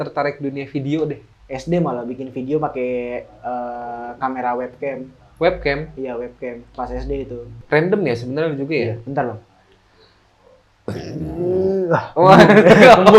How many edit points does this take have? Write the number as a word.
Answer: two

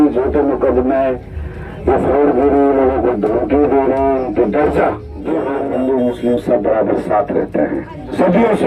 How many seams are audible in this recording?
one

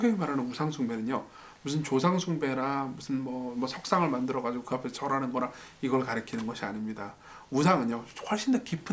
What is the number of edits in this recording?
zero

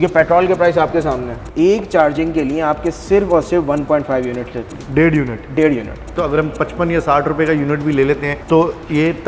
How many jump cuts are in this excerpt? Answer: three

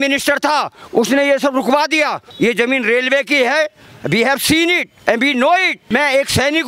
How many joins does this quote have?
two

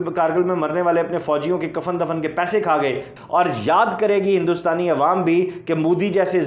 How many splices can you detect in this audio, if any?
one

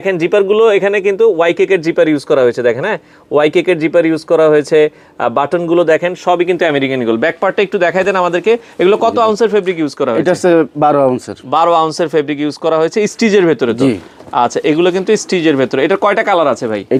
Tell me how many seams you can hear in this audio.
zero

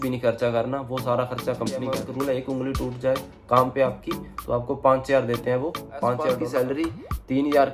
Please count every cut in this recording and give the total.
two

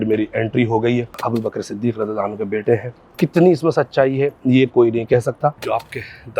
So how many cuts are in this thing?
three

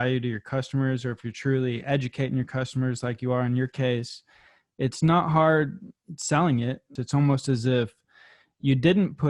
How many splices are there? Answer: one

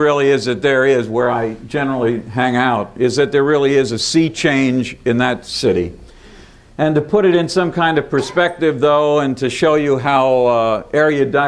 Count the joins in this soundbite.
zero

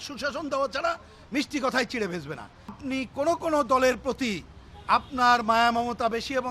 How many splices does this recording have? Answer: one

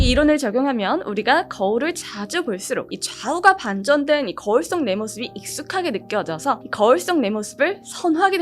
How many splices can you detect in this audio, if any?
zero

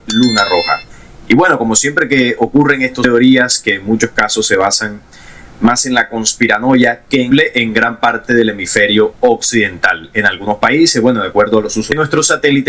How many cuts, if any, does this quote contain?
three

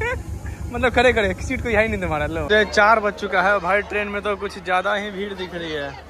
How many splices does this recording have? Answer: one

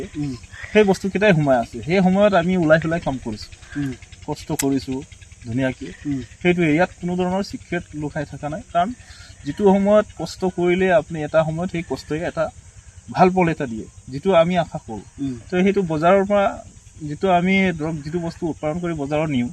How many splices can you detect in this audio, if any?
zero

